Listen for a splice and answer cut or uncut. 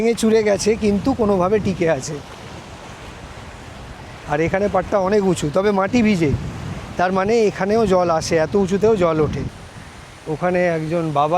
cut